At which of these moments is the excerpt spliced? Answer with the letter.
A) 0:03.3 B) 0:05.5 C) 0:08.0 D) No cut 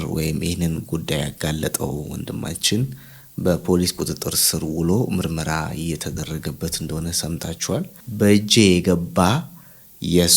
C